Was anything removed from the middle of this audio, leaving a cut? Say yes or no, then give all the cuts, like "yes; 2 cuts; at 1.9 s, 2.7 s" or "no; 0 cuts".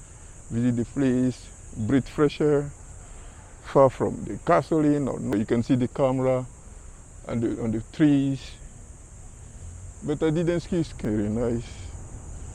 yes; 2 cuts; at 5.3 s, 10.9 s